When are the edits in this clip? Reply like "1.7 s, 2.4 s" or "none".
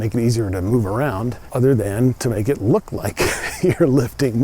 1.4 s